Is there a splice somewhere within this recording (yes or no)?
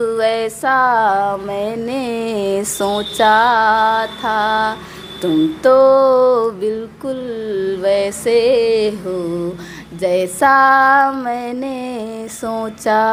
no